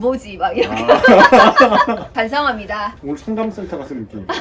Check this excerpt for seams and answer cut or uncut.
cut